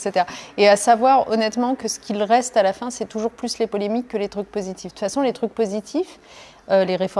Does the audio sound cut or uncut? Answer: uncut